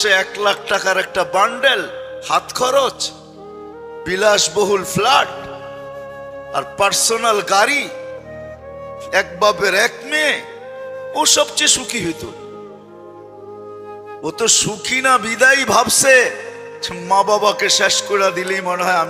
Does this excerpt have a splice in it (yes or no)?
no